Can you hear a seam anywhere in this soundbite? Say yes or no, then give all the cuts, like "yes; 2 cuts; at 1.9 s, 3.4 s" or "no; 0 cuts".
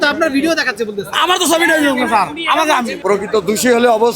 yes; 1 cut; at 2.9 s